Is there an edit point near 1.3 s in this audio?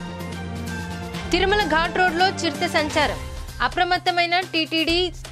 yes; 1 cut; at 1.3 s

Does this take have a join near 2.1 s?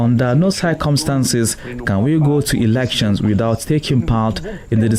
no; 0 cuts

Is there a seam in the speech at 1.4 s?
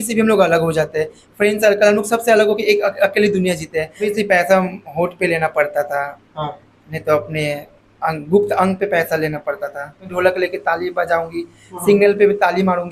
no; 2 cuts; at 4.1 s, 10.1 s

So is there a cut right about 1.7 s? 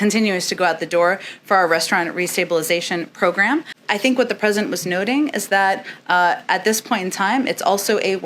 no; 1 cut; at 3.8 s

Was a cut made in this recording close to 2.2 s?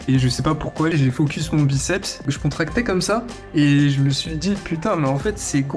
yes; 2 cuts; at 0.9 s, 2.2 s

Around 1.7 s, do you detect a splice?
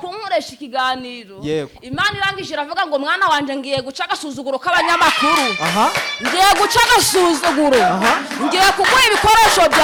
no; 0 cuts

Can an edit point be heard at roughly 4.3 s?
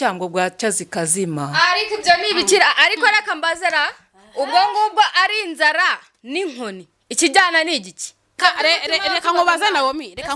no; 1 cut; at 8.4 s

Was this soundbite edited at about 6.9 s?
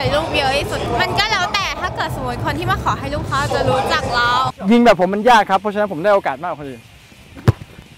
yes; 3 cuts; at 0.9 s, 4.5 s, 6.9 s

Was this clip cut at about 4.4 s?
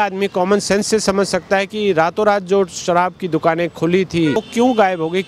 yes; 1 cut; at 4.4 s

